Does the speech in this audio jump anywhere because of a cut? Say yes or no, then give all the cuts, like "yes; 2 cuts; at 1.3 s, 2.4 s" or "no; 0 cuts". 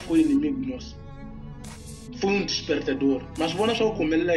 yes; 2 cuts; at 0.8 s, 2.2 s